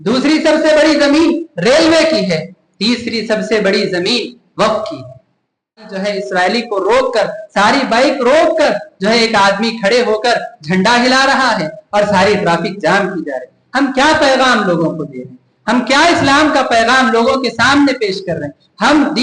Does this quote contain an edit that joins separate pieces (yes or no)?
yes